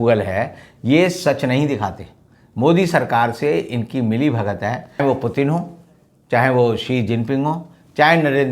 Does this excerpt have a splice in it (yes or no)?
yes